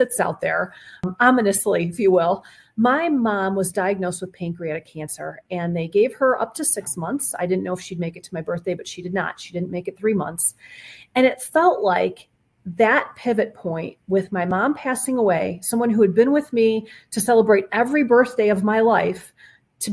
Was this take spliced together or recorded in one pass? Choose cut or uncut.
cut